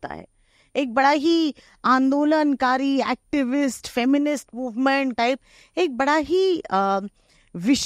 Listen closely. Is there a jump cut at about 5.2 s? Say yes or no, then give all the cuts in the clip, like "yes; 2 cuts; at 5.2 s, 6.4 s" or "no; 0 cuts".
yes; 1 cut; at 5.2 s